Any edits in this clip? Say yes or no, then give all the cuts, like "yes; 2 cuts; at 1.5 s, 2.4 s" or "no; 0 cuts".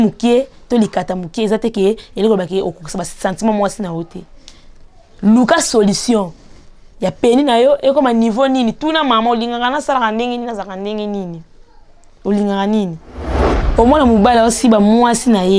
yes; 1 cut; at 13.6 s